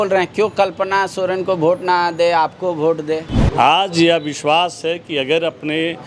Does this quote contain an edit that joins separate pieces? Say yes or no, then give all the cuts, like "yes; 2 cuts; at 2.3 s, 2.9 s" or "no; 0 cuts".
yes; 1 cut; at 3.4 s